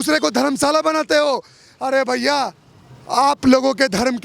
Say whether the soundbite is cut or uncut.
uncut